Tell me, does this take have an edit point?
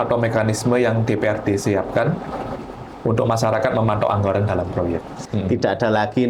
yes; 1 cut; at 5.3 s

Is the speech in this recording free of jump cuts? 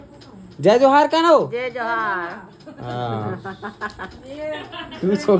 yes; 0 cuts

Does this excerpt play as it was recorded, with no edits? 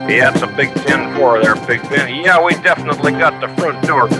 yes; 0 cuts

